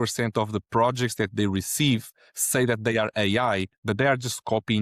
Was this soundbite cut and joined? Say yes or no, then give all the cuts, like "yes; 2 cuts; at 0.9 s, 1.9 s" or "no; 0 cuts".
no; 0 cuts